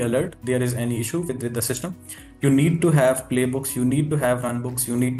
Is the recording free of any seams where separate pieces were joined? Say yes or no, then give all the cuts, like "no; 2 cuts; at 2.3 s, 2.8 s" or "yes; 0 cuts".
yes; 0 cuts